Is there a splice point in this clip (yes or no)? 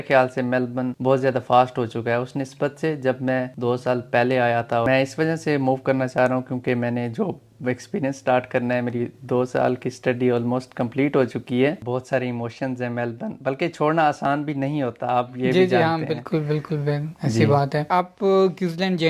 yes